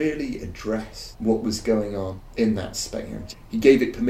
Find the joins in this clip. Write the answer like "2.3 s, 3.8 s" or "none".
1.0 s, 2.2 s, 3.2 s